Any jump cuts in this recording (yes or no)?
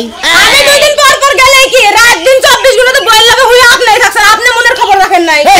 no